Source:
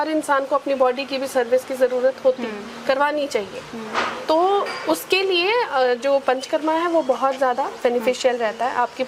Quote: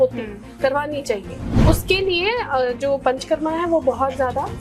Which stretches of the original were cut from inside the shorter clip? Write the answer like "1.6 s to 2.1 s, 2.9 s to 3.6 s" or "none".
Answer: 3.8 s to 4.8 s